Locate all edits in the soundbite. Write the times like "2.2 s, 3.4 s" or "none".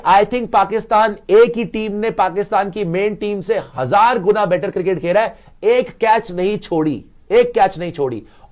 none